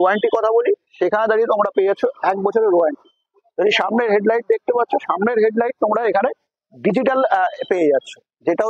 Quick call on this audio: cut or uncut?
uncut